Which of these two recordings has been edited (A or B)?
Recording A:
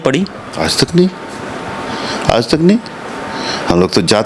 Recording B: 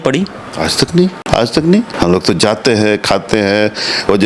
B